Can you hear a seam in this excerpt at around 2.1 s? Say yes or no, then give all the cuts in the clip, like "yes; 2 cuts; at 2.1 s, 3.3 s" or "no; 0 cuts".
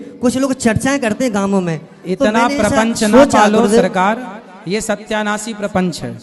no; 0 cuts